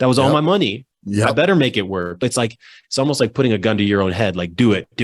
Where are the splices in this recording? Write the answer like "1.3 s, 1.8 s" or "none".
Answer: 2.2 s